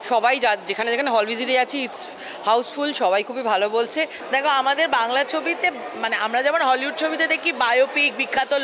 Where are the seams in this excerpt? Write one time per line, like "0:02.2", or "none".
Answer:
0:04.2

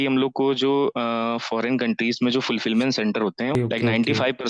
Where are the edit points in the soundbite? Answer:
0:03.5

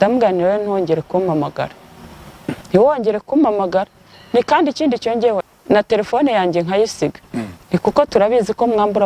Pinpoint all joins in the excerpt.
0:05.4

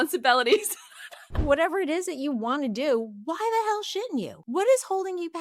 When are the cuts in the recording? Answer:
0:01.4
0:04.4

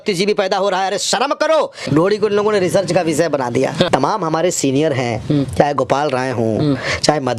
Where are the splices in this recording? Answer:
0:01.9
0:03.9

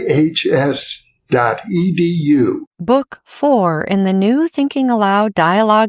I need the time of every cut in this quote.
0:02.7

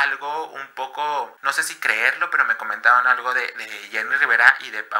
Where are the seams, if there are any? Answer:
none

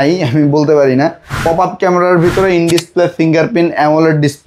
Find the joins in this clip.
0:01.3

